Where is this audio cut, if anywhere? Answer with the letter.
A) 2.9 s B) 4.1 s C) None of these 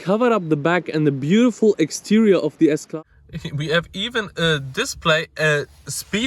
A